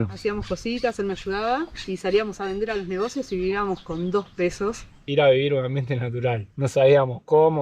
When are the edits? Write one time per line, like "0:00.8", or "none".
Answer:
0:05.0